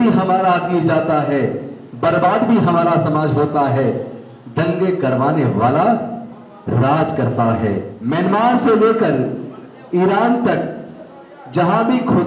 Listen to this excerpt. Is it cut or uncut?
cut